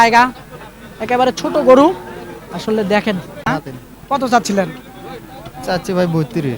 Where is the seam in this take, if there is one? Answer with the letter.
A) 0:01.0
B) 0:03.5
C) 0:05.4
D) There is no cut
B